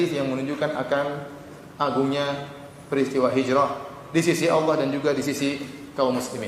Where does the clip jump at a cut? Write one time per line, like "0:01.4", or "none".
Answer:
none